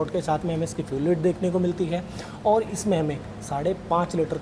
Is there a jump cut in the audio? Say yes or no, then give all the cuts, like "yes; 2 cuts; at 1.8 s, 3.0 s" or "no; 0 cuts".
no; 0 cuts